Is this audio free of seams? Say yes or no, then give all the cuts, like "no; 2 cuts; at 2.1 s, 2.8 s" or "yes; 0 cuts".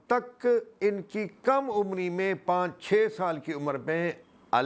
yes; 0 cuts